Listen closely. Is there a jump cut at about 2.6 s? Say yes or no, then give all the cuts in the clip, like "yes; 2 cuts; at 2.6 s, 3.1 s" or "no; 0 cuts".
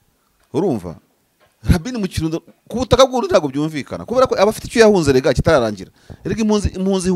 no; 0 cuts